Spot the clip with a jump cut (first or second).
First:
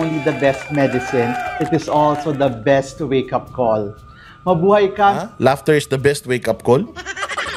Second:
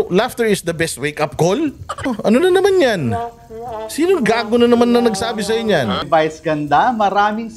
second